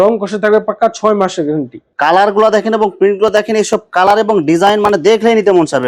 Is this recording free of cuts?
no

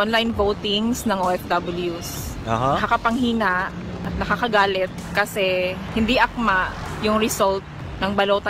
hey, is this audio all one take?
yes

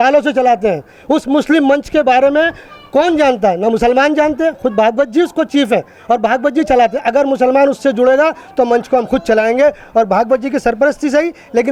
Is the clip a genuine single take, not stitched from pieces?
yes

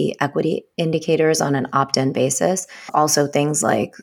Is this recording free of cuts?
no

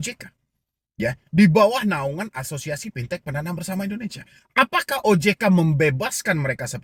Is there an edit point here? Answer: no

